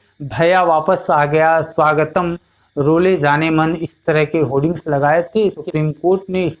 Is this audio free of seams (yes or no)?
no